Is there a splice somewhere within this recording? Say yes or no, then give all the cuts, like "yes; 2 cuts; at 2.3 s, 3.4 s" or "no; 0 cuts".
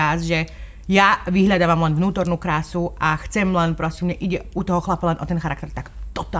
no; 0 cuts